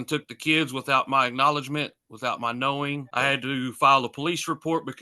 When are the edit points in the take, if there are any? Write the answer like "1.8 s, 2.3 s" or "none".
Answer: 3.1 s